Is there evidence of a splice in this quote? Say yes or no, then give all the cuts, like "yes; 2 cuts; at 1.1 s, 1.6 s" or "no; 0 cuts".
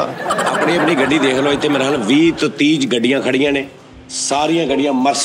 no; 0 cuts